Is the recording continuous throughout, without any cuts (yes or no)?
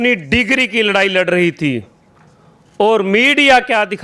yes